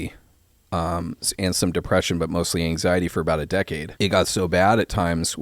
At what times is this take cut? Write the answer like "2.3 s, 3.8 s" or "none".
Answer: 3.8 s